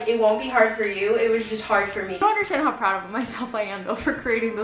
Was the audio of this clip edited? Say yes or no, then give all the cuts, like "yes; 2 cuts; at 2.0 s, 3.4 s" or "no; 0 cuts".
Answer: yes; 1 cut; at 2.1 s